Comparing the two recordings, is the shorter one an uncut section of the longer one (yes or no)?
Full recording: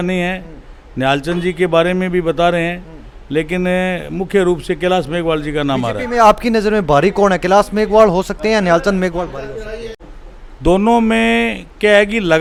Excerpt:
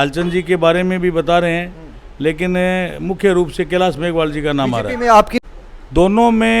no